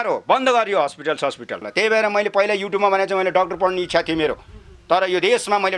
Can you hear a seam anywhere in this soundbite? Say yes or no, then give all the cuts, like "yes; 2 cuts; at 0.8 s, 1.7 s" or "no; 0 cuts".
yes; 1 cut; at 1.6 s